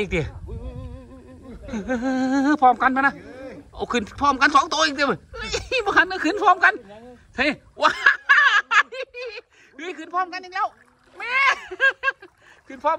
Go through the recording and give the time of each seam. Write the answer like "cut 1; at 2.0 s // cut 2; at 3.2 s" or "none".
none